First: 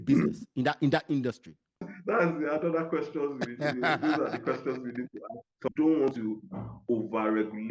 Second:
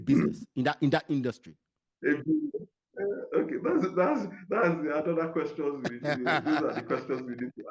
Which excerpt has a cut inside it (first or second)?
first